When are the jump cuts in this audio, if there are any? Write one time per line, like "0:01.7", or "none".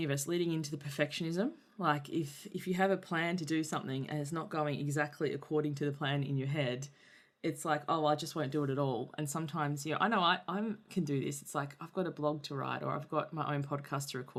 none